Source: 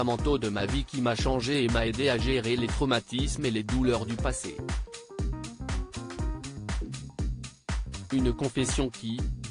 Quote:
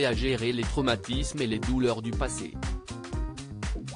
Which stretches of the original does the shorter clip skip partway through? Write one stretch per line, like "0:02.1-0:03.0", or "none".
0:04.4-0:05.5